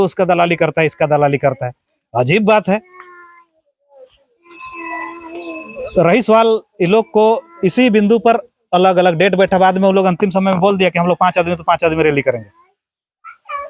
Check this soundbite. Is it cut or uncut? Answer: uncut